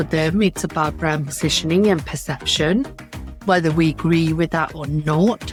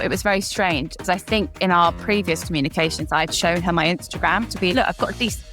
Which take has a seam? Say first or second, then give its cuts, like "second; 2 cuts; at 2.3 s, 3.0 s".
second; 2 cuts; at 1.0 s, 4.7 s